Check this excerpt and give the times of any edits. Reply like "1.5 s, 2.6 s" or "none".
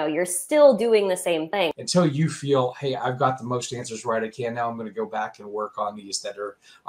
1.7 s